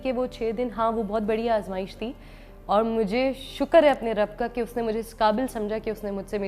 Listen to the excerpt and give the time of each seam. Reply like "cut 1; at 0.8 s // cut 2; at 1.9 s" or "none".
none